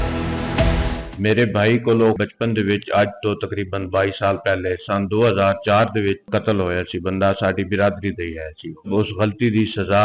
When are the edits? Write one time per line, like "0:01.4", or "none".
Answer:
0:01.0
0:02.2
0:06.2
0:08.9